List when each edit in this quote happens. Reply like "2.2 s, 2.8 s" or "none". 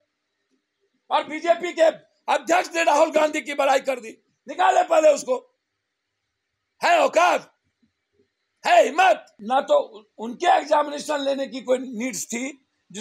9.3 s